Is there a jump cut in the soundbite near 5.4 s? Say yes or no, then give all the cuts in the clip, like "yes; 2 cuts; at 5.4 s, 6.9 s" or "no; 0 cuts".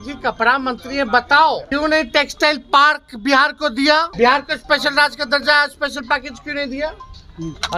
no; 2 cuts; at 1.6 s, 4.1 s